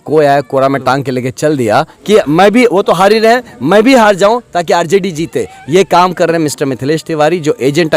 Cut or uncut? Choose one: cut